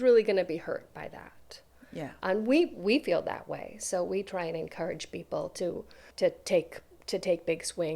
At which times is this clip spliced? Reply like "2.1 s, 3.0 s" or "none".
6.0 s